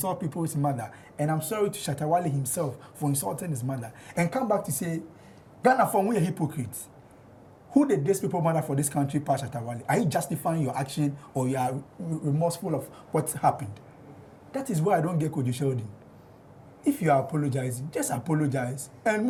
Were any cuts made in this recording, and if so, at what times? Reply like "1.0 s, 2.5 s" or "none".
none